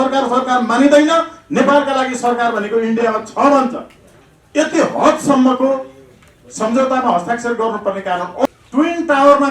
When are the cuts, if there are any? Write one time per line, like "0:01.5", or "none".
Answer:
0:08.5